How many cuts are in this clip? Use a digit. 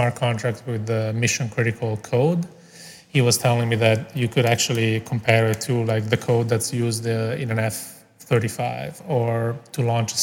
0